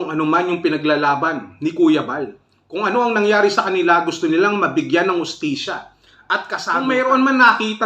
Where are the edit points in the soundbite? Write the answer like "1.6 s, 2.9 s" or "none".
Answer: 6.6 s